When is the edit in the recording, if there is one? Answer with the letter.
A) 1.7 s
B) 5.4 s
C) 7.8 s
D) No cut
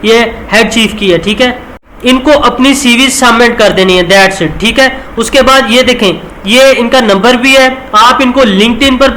A